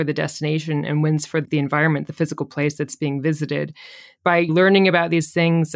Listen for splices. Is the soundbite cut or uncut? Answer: cut